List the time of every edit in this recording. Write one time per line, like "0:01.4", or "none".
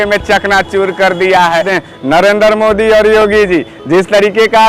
0:01.7